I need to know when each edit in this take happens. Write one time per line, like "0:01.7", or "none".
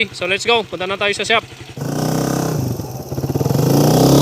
0:01.8